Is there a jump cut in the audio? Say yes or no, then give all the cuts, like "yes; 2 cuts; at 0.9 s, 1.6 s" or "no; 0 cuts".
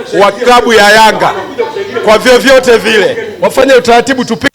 yes; 1 cut; at 3.3 s